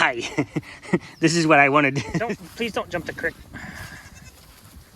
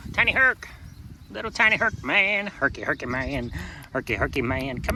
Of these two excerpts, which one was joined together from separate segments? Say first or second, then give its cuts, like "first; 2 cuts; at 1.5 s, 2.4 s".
first; 1 cut; at 2.2 s